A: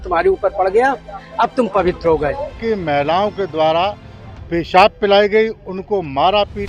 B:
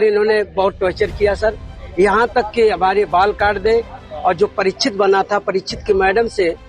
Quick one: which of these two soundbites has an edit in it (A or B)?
A